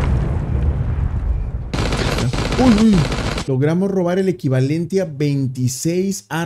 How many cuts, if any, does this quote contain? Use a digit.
1